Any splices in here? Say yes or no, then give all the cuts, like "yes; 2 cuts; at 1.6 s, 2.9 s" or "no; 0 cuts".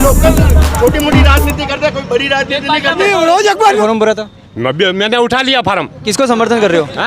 yes; 1 cut; at 3.8 s